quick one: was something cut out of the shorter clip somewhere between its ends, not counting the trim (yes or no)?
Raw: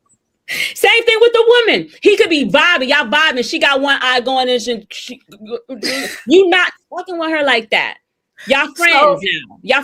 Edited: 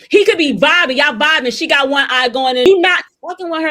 yes